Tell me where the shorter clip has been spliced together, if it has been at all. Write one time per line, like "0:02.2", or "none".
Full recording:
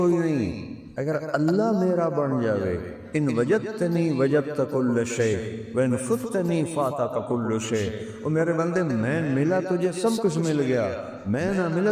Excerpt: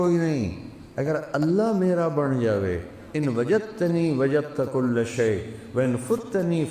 none